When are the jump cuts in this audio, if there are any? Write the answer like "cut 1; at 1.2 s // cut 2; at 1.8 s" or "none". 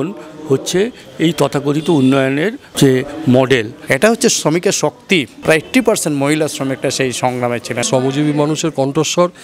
cut 1; at 3.9 s // cut 2; at 5.3 s // cut 3; at 7.8 s